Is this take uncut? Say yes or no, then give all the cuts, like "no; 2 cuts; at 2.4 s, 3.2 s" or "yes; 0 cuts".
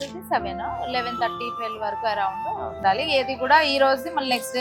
no; 1 cut; at 2.7 s